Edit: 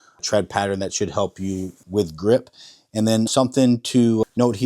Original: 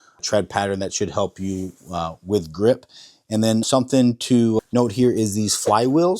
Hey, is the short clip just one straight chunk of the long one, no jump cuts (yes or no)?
no